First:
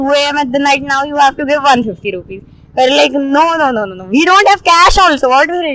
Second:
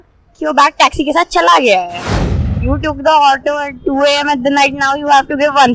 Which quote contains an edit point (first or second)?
second